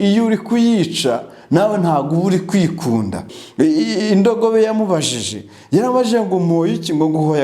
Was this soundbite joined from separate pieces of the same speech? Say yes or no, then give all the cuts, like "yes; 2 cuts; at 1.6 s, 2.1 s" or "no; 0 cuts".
yes; 1 cut; at 3.4 s